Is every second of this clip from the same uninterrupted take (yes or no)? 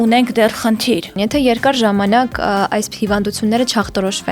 no